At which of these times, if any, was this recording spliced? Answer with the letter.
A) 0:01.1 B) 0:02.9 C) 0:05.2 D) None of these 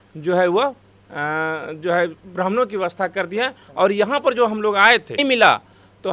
C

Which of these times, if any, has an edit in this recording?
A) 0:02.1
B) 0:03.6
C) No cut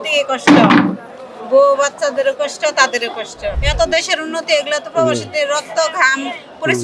B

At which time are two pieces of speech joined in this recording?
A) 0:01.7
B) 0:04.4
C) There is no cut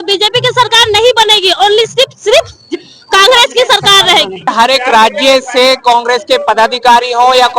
B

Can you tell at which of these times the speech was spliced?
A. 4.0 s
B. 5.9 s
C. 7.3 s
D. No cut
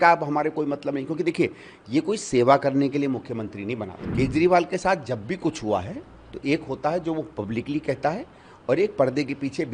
A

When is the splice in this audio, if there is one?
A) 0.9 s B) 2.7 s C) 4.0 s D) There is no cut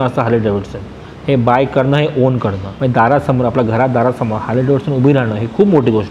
B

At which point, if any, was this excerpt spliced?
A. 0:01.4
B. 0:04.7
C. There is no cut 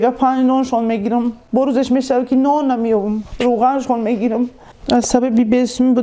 B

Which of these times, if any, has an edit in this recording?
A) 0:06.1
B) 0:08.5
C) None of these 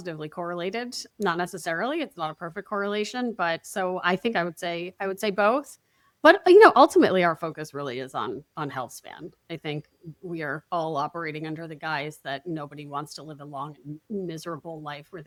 C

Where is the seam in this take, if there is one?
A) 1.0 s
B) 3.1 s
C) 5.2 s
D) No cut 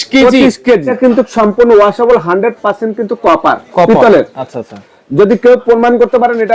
A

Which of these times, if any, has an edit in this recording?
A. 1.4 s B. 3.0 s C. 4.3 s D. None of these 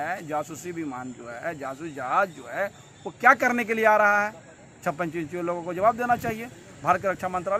D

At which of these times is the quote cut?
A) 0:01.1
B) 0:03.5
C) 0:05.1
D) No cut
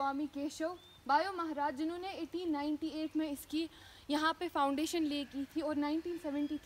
D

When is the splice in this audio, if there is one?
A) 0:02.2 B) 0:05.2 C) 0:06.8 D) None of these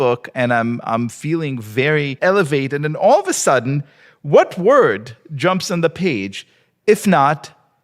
A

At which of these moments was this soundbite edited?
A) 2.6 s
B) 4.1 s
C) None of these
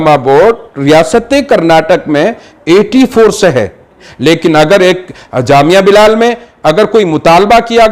B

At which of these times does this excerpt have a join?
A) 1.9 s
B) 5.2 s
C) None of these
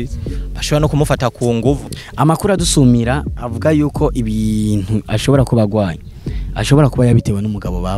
A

